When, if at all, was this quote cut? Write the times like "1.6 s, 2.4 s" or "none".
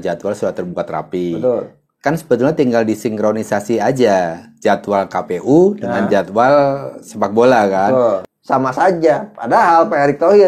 8.3 s